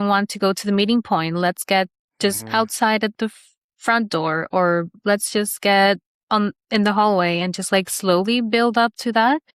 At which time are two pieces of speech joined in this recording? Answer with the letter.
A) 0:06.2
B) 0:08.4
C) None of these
C